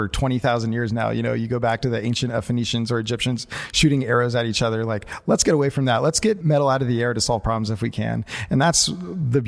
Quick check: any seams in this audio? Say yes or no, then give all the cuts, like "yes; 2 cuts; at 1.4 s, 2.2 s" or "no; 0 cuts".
yes; 1 cut; at 6.4 s